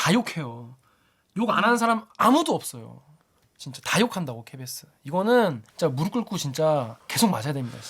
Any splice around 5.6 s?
yes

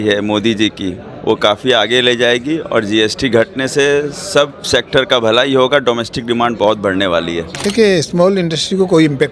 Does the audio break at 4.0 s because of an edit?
no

